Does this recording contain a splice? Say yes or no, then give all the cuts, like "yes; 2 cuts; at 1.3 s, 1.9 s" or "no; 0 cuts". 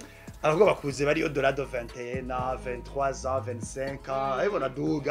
no; 0 cuts